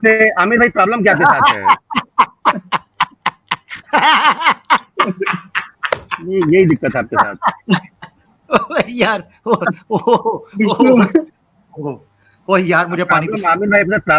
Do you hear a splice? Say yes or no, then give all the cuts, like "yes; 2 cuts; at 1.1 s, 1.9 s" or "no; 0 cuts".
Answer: no; 0 cuts